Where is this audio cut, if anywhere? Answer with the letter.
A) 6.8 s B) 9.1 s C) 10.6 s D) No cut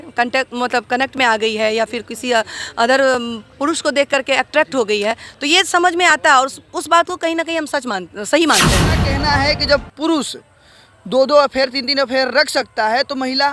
B